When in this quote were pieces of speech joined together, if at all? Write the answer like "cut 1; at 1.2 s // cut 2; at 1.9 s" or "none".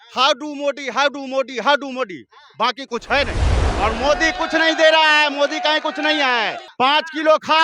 cut 1; at 3.6 s // cut 2; at 6.6 s